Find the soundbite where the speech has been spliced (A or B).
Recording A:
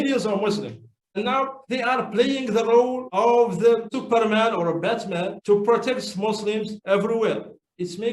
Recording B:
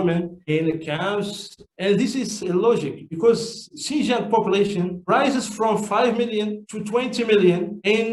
A